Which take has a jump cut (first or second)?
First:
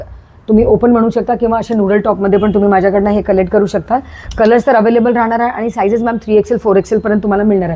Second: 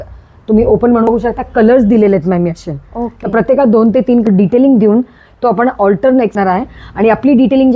second